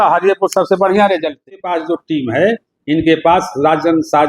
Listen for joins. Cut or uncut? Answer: cut